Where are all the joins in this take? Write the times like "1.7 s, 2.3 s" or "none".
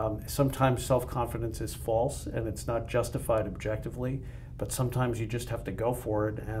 none